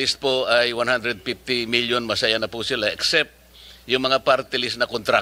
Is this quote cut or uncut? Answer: uncut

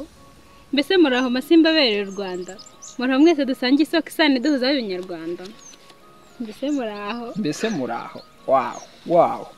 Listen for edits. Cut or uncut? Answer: uncut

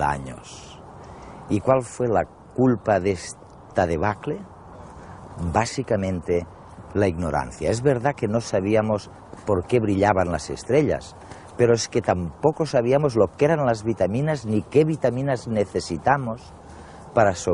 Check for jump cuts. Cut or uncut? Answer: cut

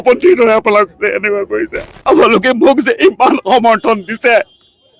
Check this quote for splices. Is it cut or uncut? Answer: cut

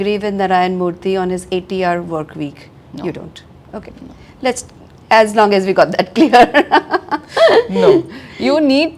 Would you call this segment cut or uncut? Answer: uncut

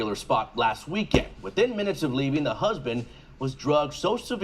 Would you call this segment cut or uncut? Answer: cut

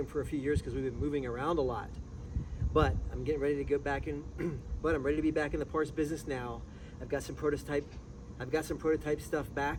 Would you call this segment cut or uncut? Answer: uncut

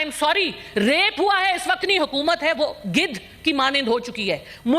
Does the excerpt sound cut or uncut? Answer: cut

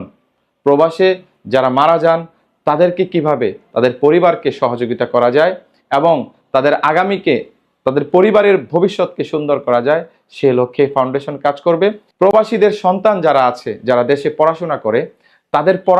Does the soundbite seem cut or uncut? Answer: uncut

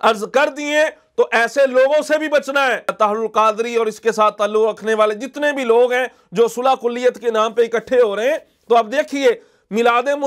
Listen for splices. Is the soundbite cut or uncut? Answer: cut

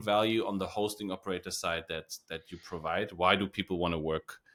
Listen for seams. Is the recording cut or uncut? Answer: uncut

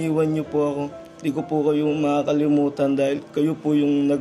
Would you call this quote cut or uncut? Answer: cut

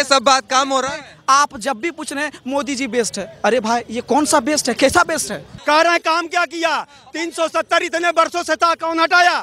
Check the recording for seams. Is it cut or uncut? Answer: cut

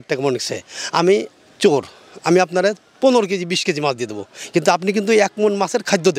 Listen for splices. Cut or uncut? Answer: uncut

